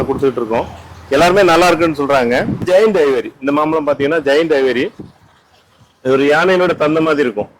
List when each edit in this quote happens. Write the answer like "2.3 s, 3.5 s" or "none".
2.6 s